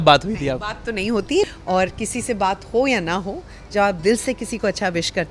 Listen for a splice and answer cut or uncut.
cut